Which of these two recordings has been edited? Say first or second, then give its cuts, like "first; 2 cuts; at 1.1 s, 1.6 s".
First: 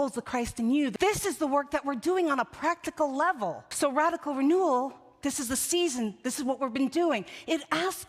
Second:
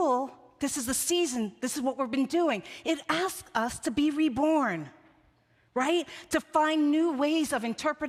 first; 2 cuts; at 0.9 s, 3.7 s